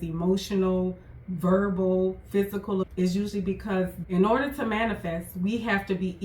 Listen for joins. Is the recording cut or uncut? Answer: cut